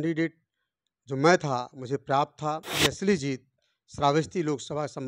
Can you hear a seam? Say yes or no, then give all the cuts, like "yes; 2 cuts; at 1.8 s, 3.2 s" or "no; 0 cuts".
yes; 1 cut; at 2.7 s